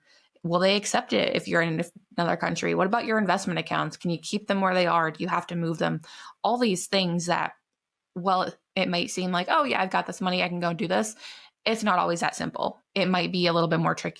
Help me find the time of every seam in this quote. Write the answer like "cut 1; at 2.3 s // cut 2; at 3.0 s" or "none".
none